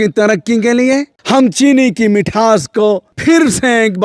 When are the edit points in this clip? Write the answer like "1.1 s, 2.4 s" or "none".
1.1 s, 3.1 s